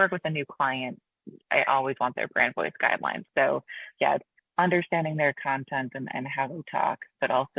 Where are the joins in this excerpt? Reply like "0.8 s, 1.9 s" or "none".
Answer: 3.2 s

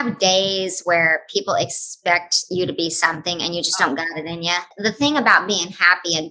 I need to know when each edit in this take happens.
4.7 s

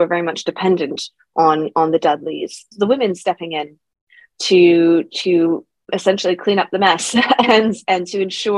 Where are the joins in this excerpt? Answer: 2.7 s

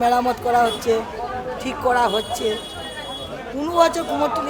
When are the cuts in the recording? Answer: none

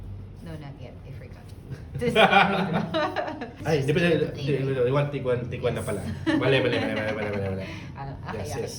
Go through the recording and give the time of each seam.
3.5 s

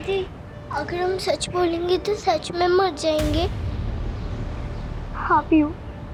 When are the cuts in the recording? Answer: none

